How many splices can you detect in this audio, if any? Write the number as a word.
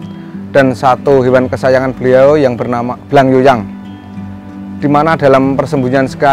one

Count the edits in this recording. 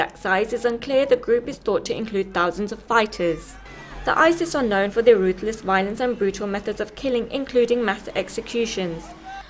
one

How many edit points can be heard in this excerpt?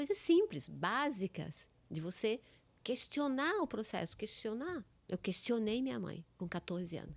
two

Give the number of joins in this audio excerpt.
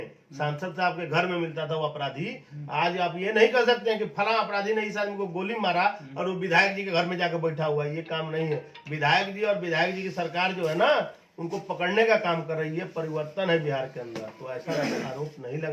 zero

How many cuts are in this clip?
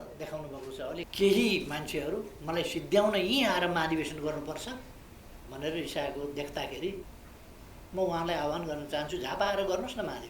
two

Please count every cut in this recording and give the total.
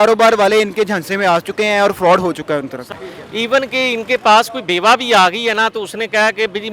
one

